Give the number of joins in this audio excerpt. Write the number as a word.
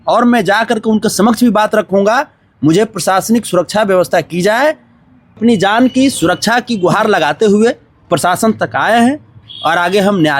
one